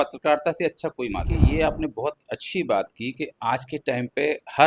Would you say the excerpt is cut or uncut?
cut